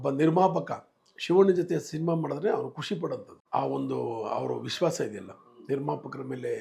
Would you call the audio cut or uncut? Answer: uncut